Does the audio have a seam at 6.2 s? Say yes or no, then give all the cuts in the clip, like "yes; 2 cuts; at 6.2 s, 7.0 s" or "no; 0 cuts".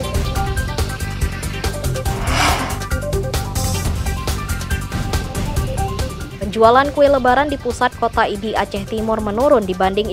yes; 1 cut; at 6.2 s